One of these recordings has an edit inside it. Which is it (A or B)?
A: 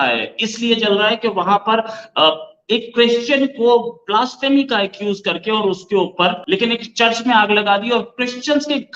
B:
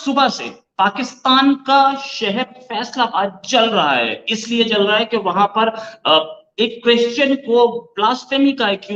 A